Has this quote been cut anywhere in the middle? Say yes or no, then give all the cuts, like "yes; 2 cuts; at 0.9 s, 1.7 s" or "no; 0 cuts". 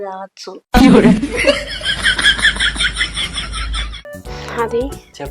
yes; 1 cut; at 4.0 s